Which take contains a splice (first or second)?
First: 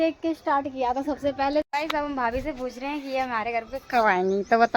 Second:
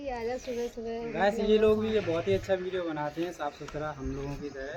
first